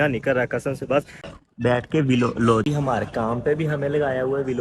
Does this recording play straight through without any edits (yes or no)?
no